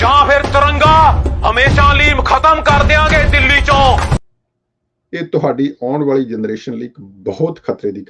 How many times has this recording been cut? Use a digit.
1